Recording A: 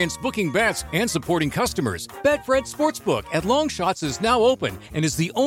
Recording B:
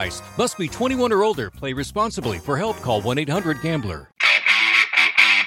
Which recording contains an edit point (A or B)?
B